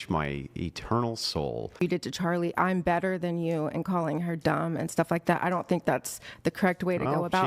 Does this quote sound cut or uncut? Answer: cut